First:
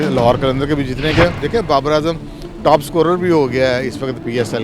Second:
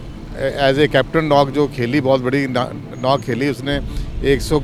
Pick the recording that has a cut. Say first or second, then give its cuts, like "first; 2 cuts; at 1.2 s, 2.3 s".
first; 1 cut; at 1.4 s